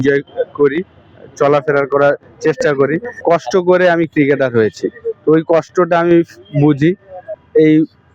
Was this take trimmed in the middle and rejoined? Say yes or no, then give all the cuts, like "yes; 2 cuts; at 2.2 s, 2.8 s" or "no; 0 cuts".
yes; 2 cuts; at 3.2 s, 7.3 s